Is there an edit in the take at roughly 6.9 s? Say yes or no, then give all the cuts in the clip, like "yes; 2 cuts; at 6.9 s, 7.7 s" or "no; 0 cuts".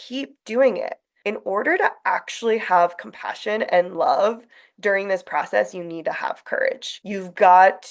yes; 2 cuts; at 1.1 s, 6.9 s